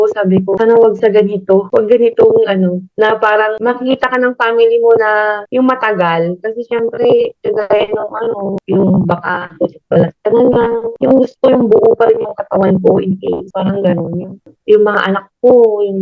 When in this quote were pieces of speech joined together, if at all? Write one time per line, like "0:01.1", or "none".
none